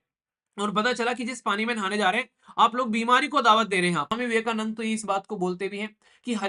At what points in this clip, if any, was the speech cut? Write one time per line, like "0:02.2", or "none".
0:04.1